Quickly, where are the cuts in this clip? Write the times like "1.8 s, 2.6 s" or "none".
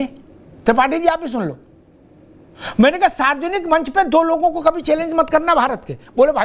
none